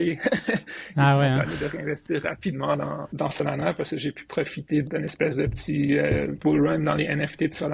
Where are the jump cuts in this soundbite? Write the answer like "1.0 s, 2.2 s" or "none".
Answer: 3.0 s, 4.8 s, 6.3 s